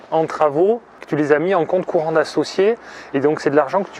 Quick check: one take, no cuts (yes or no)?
no